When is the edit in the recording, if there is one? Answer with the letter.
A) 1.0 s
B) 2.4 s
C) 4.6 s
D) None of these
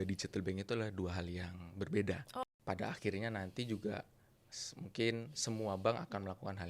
B